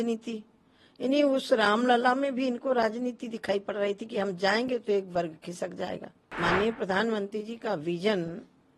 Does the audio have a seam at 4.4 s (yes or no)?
no